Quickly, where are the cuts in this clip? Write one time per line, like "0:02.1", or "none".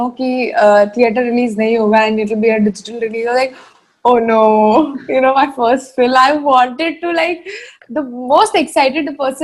none